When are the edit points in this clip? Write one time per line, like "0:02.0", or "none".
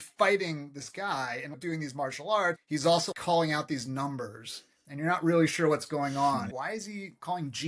0:02.6
0:06.6